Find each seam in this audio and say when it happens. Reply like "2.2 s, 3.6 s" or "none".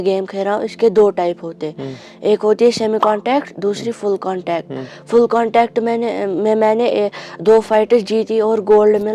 none